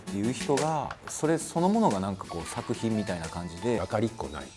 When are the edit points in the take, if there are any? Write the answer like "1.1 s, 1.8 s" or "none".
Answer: 1.1 s, 3.8 s